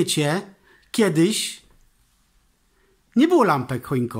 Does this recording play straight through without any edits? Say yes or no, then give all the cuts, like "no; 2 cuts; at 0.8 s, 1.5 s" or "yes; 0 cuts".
yes; 0 cuts